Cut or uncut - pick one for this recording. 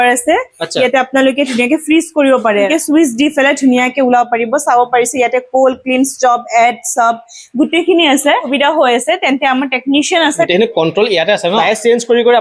cut